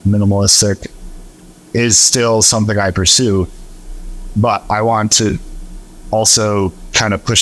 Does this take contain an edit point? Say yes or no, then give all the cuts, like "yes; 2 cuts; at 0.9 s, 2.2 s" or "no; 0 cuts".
no; 0 cuts